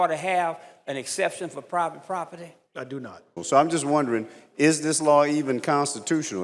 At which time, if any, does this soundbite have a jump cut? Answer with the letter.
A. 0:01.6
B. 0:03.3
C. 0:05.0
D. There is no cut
B